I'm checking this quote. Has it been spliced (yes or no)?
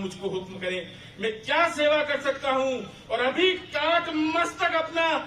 no